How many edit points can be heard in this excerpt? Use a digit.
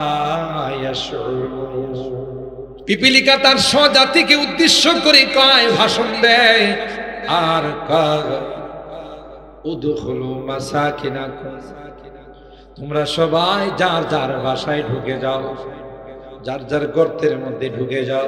1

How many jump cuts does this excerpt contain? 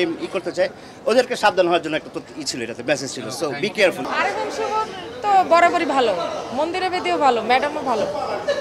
1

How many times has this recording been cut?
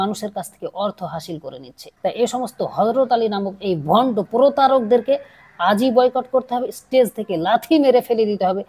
1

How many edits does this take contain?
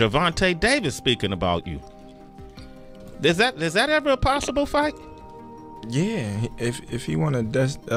0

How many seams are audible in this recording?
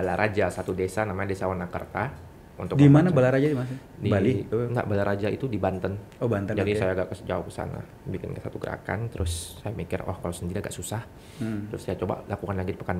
1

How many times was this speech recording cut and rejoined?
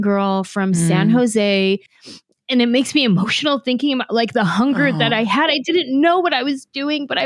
1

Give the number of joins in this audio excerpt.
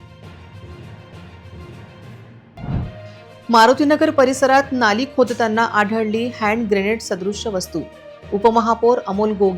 1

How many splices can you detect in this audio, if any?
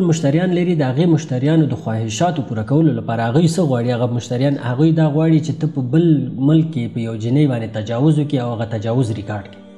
0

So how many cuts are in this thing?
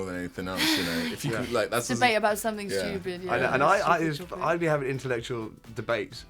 0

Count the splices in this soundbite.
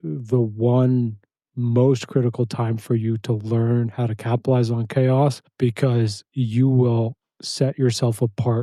1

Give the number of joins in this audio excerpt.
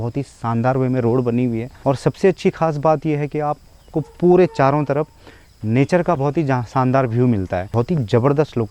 2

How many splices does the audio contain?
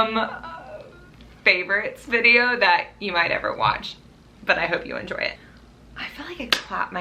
1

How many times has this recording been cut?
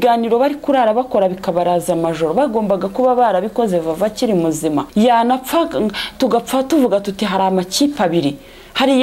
1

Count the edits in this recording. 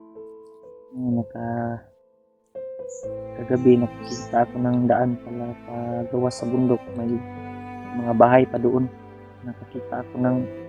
1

